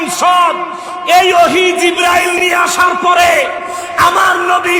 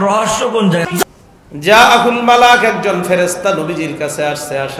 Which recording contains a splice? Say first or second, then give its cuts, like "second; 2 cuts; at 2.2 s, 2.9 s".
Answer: second; 1 cut; at 1.0 s